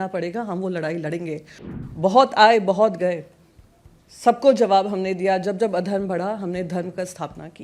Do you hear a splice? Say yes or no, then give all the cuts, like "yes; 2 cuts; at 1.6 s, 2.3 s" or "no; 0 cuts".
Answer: yes; 1 cut; at 1.6 s